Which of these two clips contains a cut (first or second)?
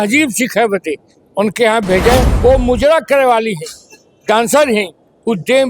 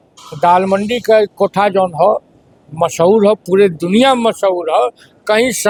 first